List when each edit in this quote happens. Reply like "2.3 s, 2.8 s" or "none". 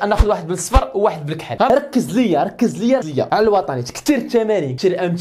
1.7 s